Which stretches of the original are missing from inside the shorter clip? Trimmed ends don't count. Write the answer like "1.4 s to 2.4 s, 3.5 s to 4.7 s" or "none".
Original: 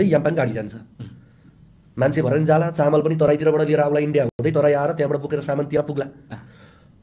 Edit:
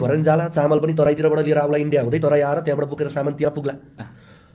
4.3 s to 4.4 s